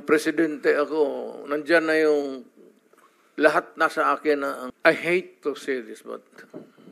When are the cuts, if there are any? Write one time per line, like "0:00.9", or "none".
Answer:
0:04.7